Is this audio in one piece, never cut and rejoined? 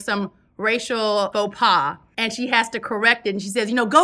no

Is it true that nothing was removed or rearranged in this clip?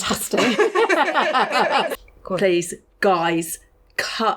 no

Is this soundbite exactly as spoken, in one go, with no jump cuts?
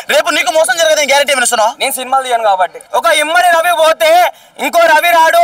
no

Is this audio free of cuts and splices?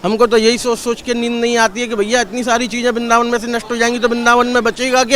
yes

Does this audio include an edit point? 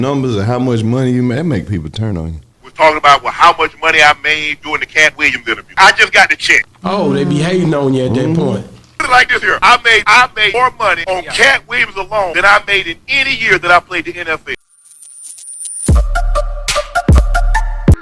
yes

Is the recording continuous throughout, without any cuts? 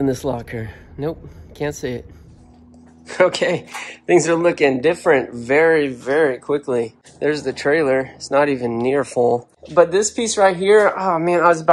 yes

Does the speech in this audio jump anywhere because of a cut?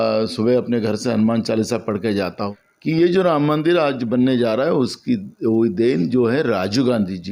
yes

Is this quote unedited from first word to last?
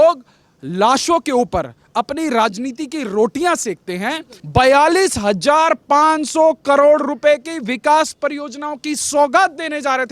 no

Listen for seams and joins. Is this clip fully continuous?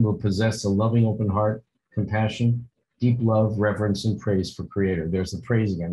yes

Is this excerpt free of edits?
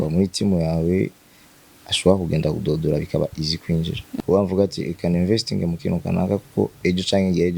no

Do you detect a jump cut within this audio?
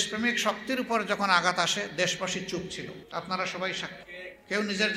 yes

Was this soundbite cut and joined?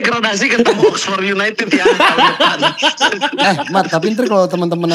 no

